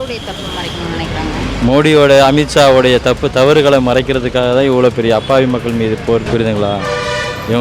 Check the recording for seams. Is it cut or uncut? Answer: cut